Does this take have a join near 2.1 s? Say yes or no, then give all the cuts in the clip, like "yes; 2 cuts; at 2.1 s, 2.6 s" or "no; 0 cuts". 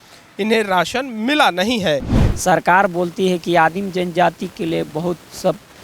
yes; 1 cut; at 2.1 s